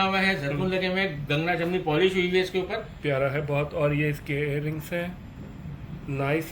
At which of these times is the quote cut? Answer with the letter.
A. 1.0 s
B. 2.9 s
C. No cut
C